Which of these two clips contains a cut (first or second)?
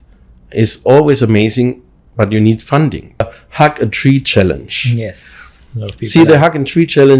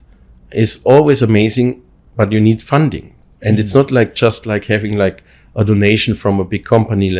first